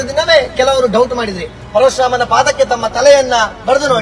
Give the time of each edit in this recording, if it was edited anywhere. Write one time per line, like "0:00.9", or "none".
0:01.6